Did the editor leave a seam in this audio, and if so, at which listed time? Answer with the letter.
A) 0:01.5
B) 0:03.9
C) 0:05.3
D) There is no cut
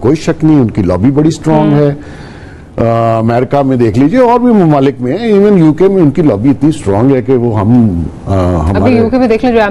D